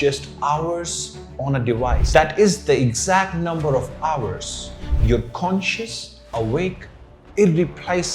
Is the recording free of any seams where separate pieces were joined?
no; 1 cut; at 2.0 s

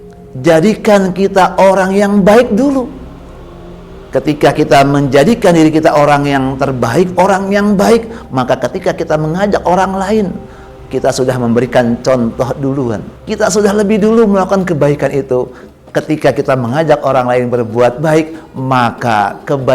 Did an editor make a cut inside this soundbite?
yes; 1 cut; at 13.1 s

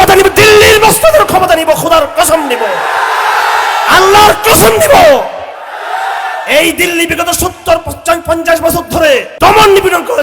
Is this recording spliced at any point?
yes; 1 cut; at 9.3 s

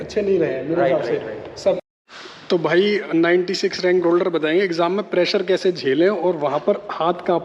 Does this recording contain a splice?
yes; 1 cut; at 1.8 s

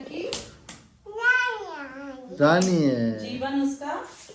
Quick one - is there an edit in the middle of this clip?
no; 0 cuts

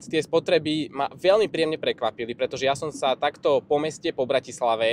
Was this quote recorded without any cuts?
yes; 0 cuts

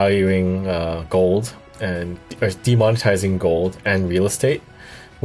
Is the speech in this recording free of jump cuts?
yes; 0 cuts

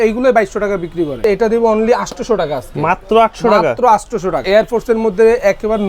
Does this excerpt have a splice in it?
yes; 2 cuts; at 1.2 s, 4.4 s

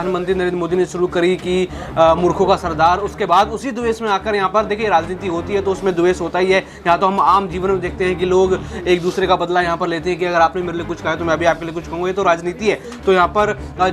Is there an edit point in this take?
no; 0 cuts

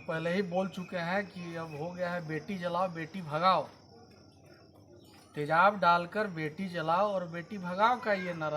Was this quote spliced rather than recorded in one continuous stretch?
no; 0 cuts

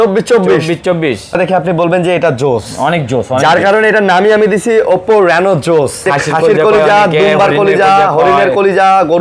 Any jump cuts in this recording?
yes; 2 cuts; at 1.4 s, 6.1 s

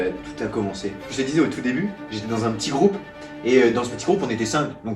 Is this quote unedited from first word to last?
no; 1 cut; at 1.0 s

